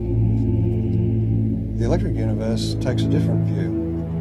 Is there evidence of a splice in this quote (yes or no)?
yes